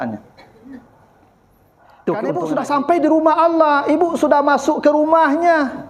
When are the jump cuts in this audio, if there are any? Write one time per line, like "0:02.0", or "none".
0:02.4